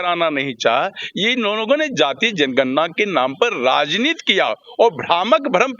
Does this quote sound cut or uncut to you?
uncut